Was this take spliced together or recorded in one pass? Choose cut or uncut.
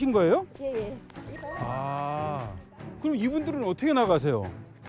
cut